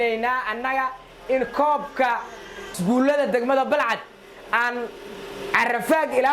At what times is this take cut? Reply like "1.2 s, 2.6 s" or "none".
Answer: 2.6 s